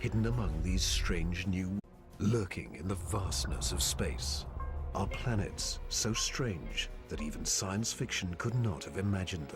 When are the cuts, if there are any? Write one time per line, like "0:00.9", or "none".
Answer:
none

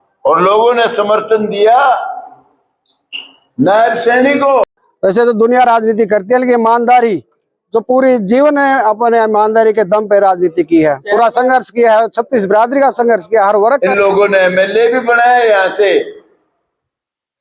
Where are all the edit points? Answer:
0:04.6
0:13.8

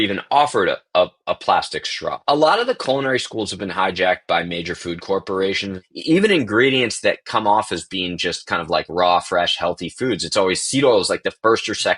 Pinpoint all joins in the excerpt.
0:02.2
0:05.8

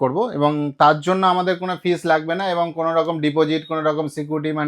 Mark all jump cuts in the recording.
none

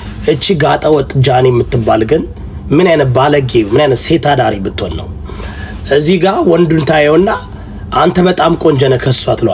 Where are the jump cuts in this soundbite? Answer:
none

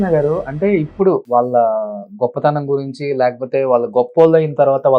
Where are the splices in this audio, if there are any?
0:01.2

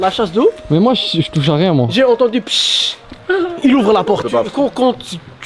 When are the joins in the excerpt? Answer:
0:04.3

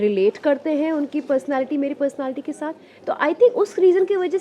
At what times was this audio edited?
0:02.9

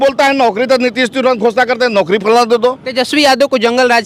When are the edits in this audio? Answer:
0:02.8

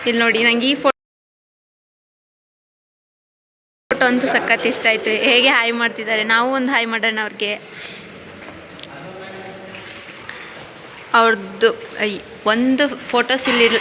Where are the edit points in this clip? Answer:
none

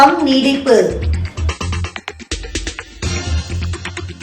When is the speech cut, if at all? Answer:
none

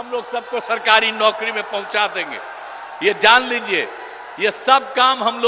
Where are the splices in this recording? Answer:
none

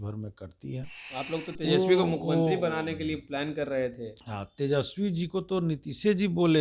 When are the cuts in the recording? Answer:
0:01.0

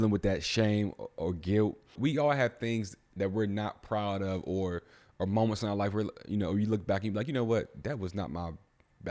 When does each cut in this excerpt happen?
0:02.0

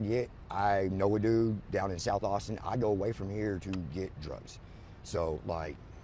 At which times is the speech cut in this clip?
none

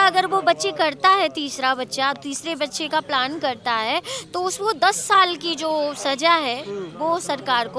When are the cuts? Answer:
none

